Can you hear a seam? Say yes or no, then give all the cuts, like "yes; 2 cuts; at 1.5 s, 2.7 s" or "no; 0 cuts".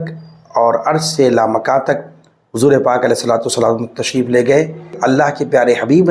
yes; 1 cut; at 5.0 s